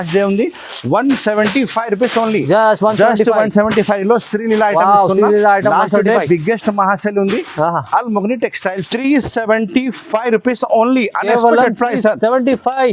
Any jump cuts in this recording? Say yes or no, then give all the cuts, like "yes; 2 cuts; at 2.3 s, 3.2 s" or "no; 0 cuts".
yes; 1 cut; at 8.9 s